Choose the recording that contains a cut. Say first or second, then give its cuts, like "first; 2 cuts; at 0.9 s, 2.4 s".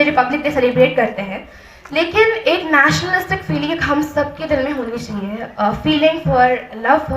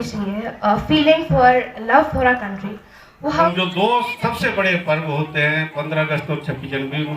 second; 1 cut; at 3.5 s